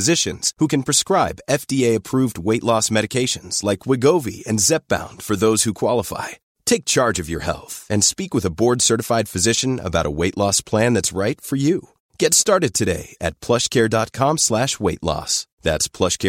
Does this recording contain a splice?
no; 0 cuts

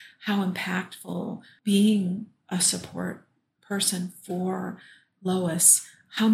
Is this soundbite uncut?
no; 1 cut; at 1.5 s

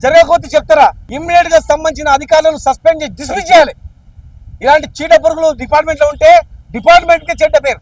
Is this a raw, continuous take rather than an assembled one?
no; 1 cut; at 1.1 s

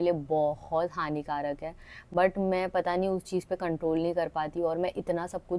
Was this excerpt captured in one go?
yes; 0 cuts

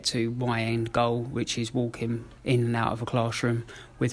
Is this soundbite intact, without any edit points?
no; 1 cut; at 2.3 s

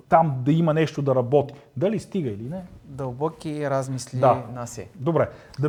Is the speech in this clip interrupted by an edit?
no; 0 cuts

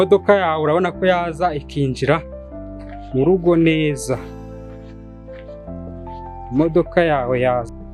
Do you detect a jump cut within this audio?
no; 0 cuts

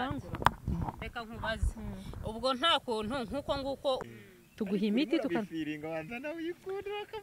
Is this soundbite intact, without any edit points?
no; 1 cut; at 4.0 s

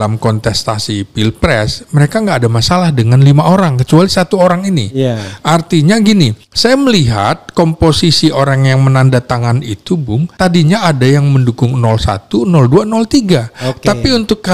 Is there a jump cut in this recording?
yes; 2 cuts; at 6.4 s, 10.3 s

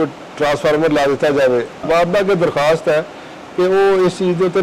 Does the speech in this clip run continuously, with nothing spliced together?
no; 1 cut; at 1.8 s

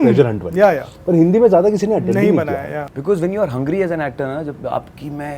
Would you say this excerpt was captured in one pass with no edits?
no; 1 cut; at 2.8 s

